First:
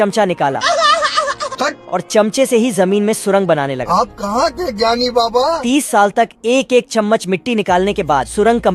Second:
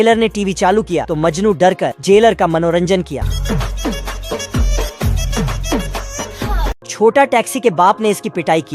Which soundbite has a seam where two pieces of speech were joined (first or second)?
second